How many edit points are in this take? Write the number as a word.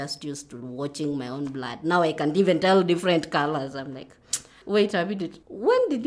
one